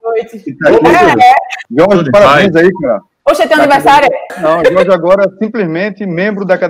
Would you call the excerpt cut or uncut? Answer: cut